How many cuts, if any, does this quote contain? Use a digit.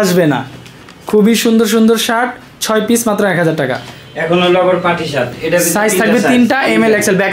0